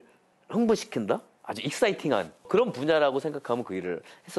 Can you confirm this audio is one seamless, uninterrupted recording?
no; 1 cut; at 2.5 s

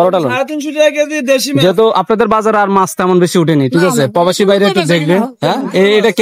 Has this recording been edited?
no; 0 cuts

